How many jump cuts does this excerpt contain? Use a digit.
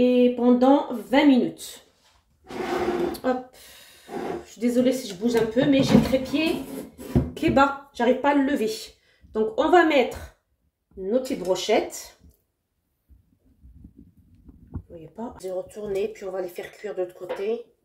1